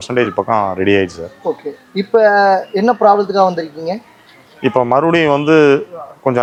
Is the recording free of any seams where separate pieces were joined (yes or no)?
yes